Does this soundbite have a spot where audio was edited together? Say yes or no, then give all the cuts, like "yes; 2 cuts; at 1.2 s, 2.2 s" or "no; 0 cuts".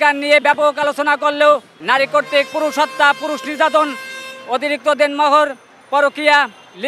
yes; 1 cut; at 1.7 s